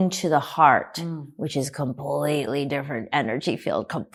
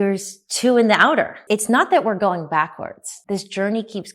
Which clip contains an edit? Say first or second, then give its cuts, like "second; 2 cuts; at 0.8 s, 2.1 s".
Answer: second; 2 cuts; at 1.4 s, 3.1 s